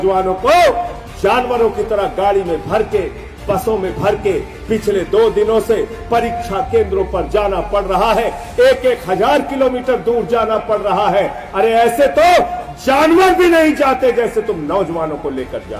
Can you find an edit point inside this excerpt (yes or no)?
no